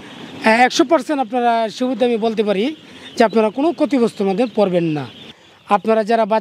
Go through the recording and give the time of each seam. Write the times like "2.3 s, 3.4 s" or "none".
5.3 s